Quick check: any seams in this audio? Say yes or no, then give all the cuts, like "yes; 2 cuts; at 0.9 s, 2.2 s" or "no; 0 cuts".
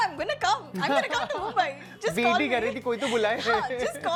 no; 0 cuts